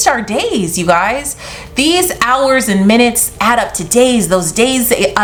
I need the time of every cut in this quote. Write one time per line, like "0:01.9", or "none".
none